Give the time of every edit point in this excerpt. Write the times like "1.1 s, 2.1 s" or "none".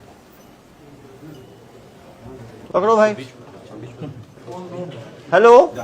2.5 s